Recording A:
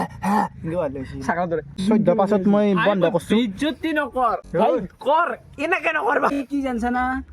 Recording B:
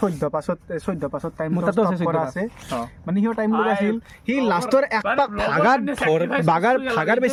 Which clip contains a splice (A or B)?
A